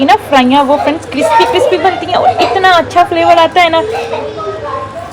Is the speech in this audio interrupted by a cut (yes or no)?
no